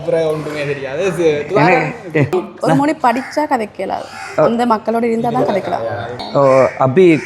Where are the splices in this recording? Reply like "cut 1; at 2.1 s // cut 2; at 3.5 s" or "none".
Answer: cut 1; at 2.3 s // cut 2; at 6.2 s